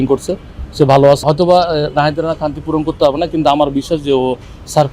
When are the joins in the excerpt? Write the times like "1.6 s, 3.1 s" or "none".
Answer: 1.2 s